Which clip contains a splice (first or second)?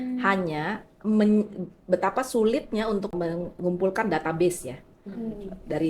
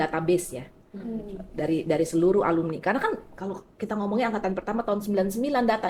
first